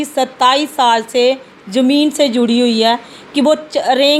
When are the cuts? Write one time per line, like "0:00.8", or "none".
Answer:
none